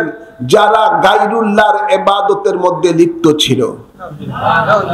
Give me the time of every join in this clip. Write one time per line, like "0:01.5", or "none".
none

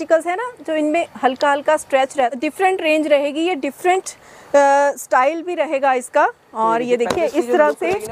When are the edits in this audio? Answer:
0:02.3

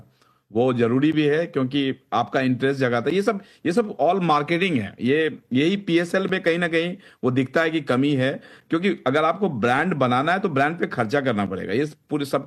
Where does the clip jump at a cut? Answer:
none

